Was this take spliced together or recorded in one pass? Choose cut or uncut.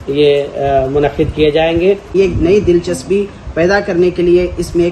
cut